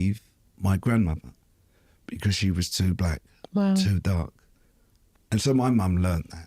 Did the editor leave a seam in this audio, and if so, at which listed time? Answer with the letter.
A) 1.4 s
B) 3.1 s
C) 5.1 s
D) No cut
C